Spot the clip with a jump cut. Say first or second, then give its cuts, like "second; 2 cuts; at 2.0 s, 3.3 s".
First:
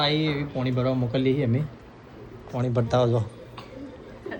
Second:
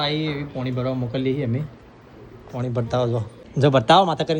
second; 1 cut; at 3.4 s